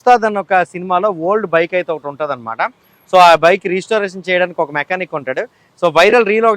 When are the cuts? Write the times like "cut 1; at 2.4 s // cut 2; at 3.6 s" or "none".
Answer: none